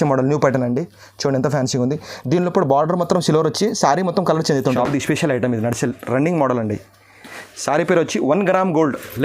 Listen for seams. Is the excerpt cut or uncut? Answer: cut